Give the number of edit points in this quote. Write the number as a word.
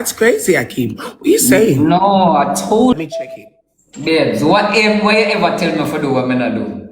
one